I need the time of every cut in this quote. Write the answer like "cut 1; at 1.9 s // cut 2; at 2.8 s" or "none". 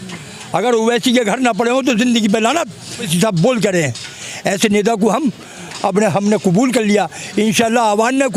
cut 1; at 3.1 s